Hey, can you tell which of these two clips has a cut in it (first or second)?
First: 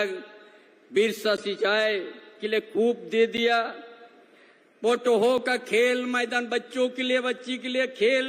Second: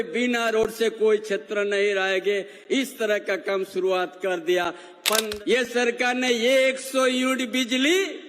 second